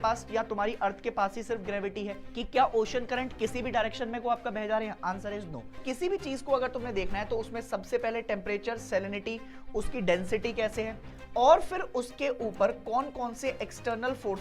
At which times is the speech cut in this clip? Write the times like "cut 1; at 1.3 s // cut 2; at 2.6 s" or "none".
cut 1; at 2.2 s // cut 2; at 5.8 s